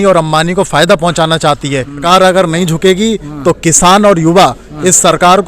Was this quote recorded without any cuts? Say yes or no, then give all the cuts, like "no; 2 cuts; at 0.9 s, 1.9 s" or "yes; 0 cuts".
no; 1 cut; at 2.0 s